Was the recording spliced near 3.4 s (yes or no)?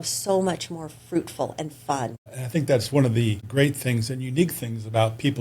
yes